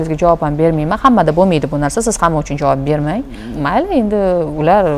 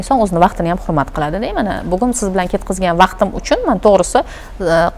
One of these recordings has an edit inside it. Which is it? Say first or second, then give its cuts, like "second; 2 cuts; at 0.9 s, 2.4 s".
first; 1 cut; at 3.4 s